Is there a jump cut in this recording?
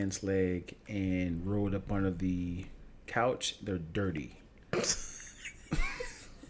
no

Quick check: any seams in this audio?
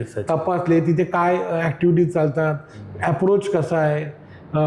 no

